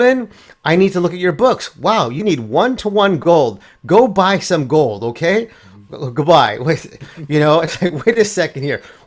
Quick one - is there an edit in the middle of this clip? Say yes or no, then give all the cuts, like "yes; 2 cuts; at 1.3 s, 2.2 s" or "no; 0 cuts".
no; 0 cuts